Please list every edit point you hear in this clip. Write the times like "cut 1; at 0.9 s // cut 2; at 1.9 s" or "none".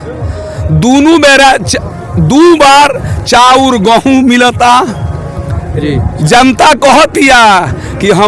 none